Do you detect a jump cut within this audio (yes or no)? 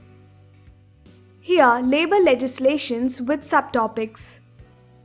yes